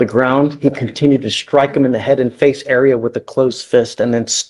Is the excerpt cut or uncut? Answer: uncut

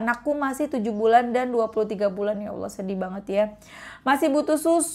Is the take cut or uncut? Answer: uncut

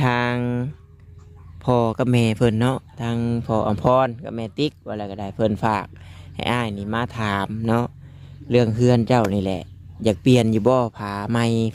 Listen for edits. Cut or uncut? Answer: uncut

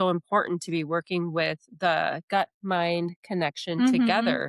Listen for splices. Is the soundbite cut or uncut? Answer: uncut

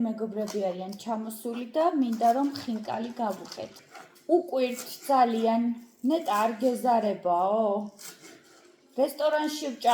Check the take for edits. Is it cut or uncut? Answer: cut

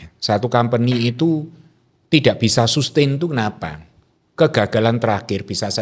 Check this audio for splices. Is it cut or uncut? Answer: uncut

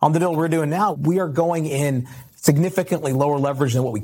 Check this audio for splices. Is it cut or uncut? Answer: cut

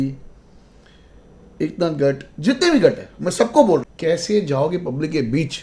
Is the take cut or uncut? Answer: cut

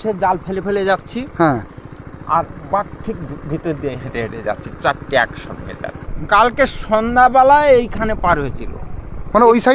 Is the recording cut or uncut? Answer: cut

